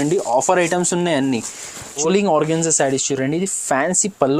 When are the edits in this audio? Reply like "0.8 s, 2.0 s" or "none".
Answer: 2.0 s

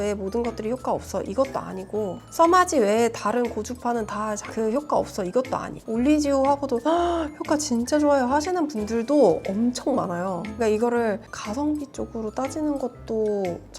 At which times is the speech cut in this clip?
10.5 s

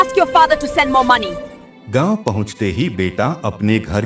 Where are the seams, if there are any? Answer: 1.3 s

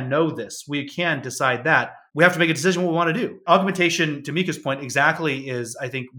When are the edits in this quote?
2.0 s, 3.4 s

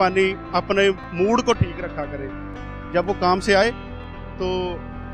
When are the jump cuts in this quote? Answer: none

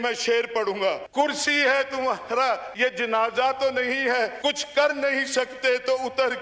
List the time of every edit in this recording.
1.0 s, 2.7 s, 4.3 s

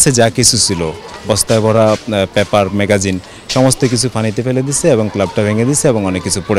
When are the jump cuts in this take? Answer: none

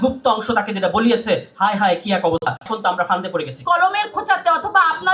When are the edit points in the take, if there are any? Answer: 3.6 s

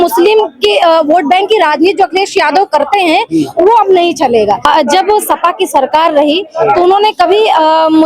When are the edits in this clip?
4.6 s

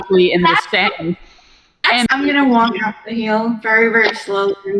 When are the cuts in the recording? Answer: 2.1 s

